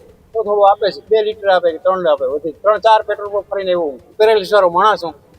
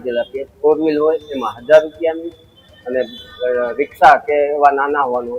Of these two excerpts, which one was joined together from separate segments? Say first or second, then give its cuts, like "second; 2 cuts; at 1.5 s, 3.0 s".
first; 3 cuts; at 1.0 s, 2.5 s, 4.0 s